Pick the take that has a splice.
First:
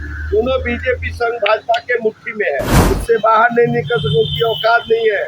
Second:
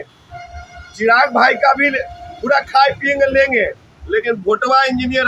first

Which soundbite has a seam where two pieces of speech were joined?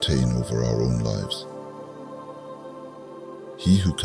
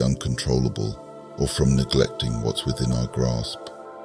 first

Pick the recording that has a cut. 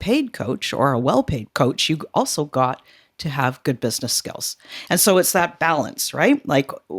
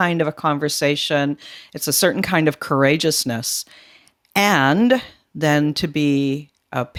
first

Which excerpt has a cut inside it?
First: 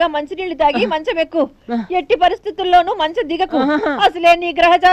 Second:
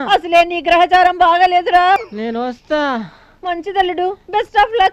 second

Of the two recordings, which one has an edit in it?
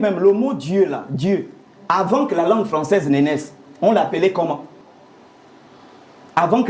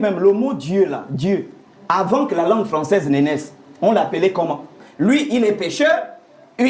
second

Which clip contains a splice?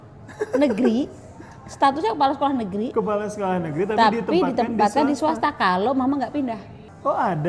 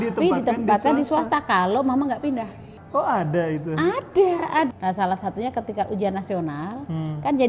second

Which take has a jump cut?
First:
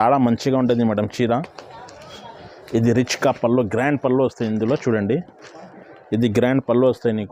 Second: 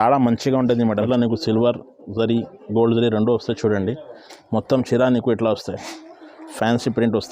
second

